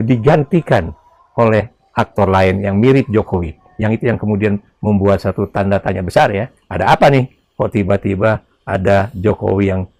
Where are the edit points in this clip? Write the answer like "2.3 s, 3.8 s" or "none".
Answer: none

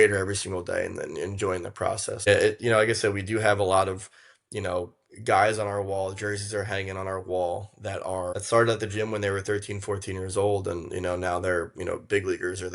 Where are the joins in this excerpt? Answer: 2.3 s, 8.4 s

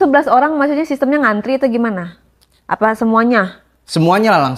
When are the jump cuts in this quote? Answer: none

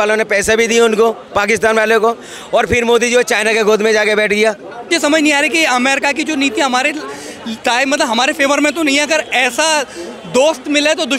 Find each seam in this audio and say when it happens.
4.9 s

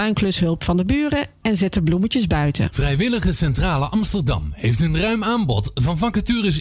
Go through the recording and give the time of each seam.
2.7 s

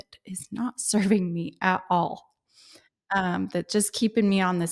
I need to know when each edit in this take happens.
none

